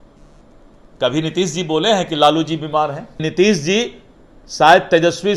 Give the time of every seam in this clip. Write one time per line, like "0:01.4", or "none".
0:03.2